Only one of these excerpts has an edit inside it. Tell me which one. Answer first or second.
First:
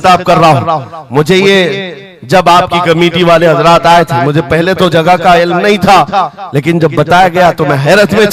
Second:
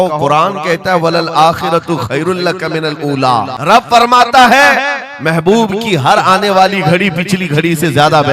second